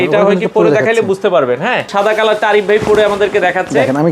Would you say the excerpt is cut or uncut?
cut